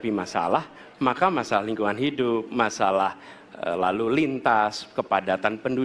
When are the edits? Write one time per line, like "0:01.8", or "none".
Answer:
none

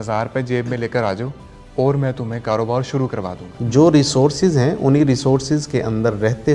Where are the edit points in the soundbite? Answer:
0:03.5

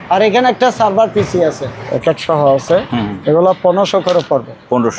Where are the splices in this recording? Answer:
0:01.7

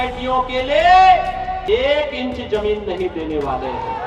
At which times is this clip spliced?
0:01.6

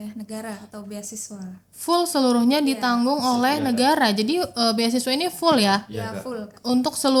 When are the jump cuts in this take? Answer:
none

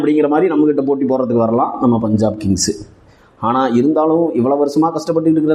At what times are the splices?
none

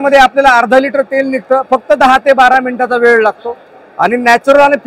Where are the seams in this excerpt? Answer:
none

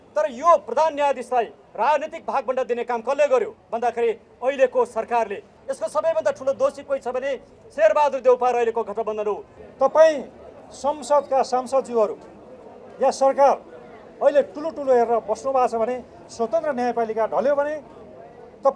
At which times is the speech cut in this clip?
0:05.5
0:09.5

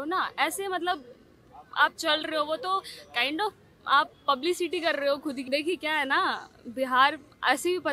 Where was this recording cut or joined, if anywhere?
0:05.4

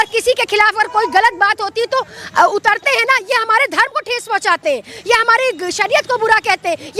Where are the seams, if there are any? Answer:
none

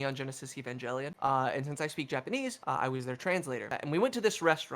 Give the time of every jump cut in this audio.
0:01.1
0:02.6
0:03.7

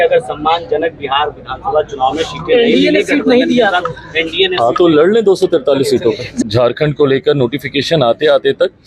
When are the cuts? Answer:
0:06.3

